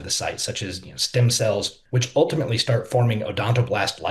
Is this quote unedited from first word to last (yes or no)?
no